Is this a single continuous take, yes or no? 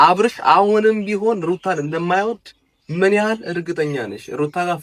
yes